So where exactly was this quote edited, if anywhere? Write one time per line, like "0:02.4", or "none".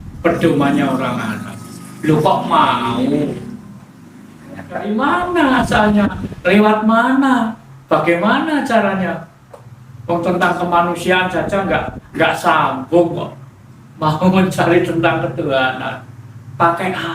0:04.9